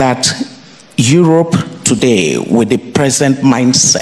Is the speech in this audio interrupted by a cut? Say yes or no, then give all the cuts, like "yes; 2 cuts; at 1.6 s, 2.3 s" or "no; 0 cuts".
no; 0 cuts